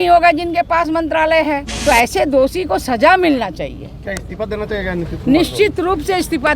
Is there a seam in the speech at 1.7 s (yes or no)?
yes